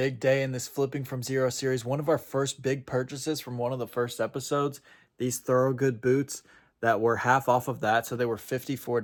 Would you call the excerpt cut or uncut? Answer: uncut